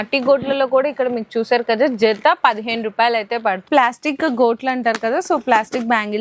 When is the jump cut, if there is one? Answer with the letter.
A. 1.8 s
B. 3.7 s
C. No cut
B